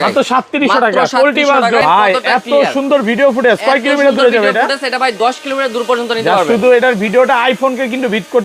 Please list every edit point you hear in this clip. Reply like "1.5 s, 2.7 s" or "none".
1.8 s